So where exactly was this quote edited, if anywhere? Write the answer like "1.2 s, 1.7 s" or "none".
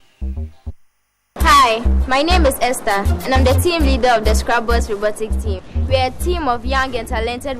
1.1 s